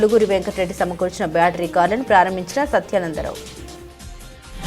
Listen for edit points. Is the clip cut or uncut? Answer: cut